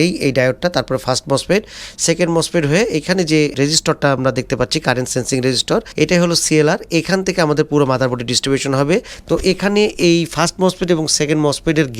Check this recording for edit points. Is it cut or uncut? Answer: cut